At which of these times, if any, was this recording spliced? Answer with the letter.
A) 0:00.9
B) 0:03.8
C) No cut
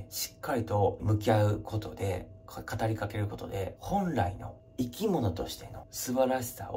B